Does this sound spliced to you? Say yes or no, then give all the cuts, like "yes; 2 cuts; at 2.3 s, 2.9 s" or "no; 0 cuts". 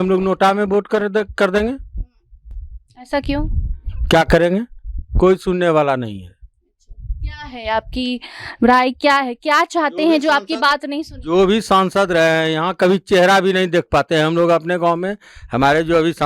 no; 0 cuts